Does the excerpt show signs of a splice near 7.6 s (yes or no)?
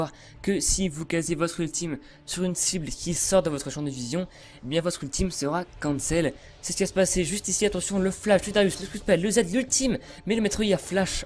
no